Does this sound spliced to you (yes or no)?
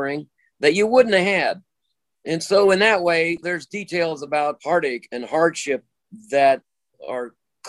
yes